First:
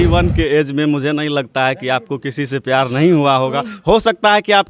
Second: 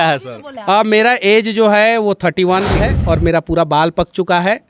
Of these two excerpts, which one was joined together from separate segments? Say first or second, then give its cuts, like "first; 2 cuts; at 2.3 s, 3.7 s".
second; 1 cut; at 2.8 s